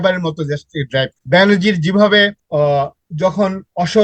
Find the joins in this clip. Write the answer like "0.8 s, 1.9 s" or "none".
1.2 s, 2.4 s